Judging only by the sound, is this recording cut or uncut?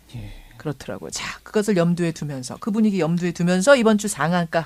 uncut